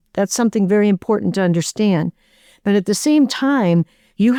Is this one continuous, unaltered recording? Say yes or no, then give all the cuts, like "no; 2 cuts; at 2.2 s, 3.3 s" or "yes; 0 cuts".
yes; 0 cuts